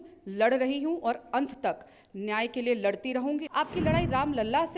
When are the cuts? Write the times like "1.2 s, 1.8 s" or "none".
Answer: 3.5 s